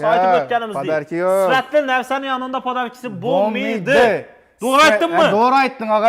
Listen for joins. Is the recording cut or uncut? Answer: uncut